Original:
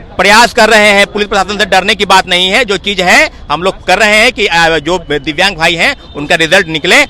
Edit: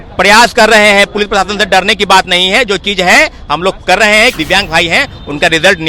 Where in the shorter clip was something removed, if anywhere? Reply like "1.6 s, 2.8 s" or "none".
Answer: 4.3 s